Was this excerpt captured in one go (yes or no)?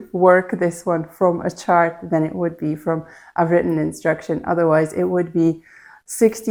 yes